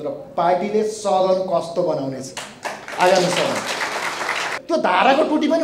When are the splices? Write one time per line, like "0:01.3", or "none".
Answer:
0:04.5